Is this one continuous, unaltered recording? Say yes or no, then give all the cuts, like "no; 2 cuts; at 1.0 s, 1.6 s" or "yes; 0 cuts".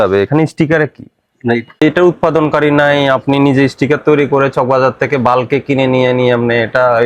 no; 1 cut; at 1.8 s